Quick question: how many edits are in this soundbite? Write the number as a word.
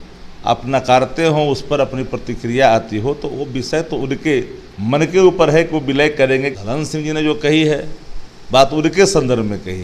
one